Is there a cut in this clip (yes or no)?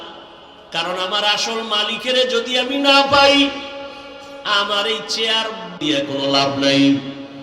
yes